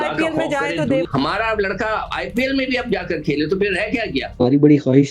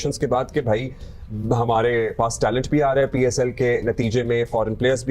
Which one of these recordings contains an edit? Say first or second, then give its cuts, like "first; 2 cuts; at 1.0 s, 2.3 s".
first; 2 cuts; at 1.1 s, 4.3 s